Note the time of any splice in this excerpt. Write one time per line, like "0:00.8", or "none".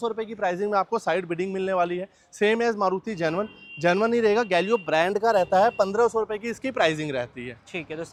none